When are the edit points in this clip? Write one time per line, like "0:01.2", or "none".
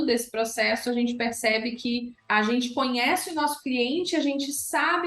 0:02.2